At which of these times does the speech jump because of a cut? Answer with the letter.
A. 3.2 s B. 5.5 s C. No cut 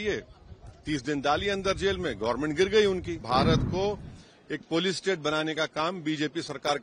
A